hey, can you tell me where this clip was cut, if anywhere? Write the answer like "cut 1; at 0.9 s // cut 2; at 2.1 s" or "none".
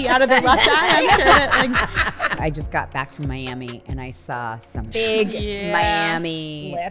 cut 1; at 2.4 s // cut 2; at 5.0 s